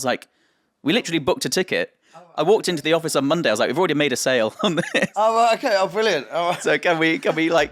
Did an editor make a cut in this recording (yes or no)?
no